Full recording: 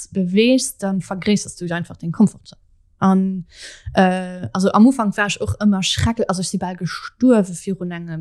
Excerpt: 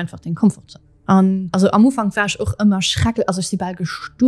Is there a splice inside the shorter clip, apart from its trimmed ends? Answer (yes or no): yes